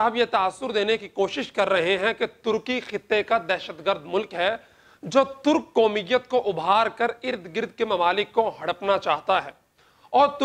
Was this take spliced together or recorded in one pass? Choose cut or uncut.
uncut